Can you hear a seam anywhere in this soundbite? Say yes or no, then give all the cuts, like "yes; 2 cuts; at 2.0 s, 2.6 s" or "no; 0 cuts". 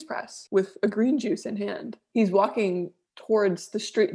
no; 0 cuts